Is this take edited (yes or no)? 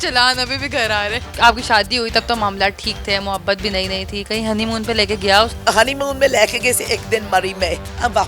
yes